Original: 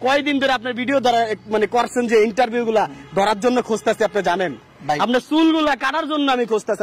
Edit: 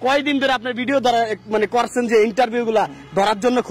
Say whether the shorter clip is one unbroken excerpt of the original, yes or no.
yes